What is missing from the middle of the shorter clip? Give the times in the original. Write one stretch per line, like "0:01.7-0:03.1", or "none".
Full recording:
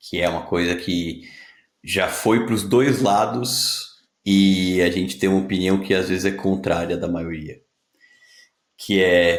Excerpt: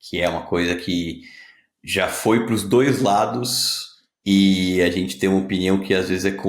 none